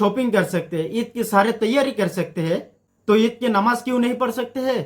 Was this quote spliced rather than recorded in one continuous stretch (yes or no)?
no